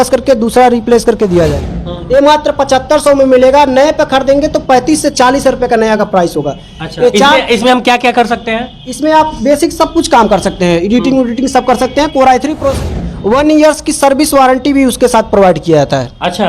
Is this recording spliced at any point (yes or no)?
yes